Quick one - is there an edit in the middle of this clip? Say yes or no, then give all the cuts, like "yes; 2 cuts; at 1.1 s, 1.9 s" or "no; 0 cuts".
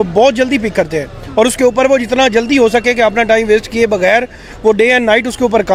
no; 0 cuts